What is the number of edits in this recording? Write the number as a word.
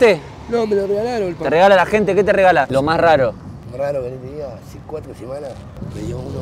two